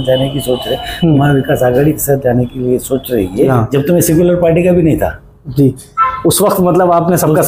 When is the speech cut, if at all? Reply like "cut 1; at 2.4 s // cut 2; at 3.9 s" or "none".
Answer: cut 1; at 3.5 s